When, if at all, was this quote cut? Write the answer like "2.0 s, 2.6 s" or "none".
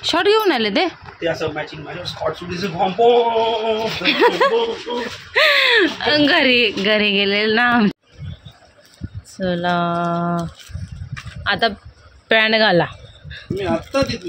7.9 s